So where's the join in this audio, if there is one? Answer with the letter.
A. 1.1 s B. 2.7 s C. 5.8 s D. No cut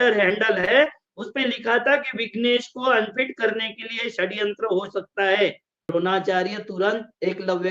C